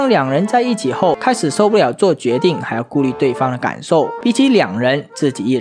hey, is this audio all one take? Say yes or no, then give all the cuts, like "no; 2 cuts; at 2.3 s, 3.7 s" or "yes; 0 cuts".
no; 2 cuts; at 1.2 s, 4.1 s